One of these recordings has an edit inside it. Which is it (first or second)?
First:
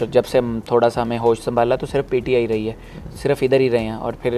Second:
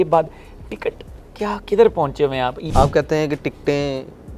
second